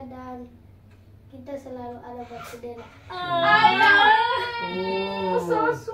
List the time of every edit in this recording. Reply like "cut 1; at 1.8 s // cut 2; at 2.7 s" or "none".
none